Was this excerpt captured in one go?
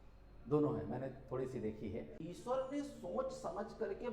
no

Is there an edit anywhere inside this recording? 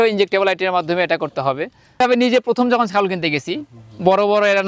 yes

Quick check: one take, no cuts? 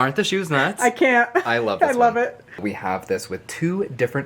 no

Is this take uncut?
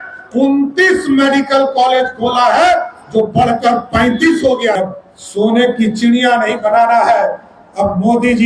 no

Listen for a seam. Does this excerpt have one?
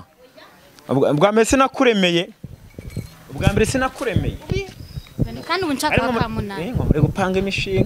yes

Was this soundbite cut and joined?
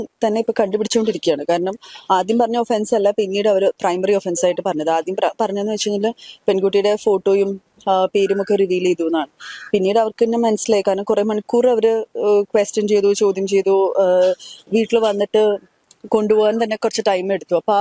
no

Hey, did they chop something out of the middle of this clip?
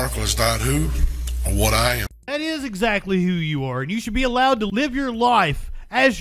yes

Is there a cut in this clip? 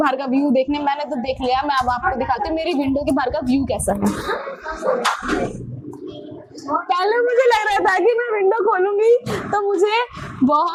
no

